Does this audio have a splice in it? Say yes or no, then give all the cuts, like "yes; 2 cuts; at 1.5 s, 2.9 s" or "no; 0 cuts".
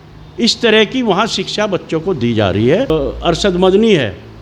yes; 1 cut; at 2.9 s